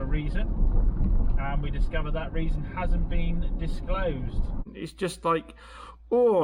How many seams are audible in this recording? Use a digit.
1